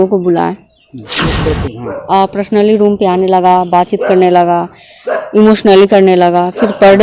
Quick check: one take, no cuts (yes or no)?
no